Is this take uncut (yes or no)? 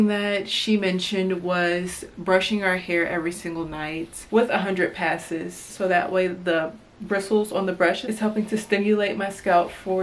no